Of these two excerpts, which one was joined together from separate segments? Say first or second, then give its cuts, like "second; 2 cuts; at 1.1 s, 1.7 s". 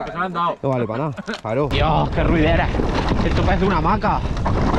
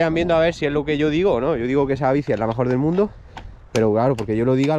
first; 1 cut; at 1.7 s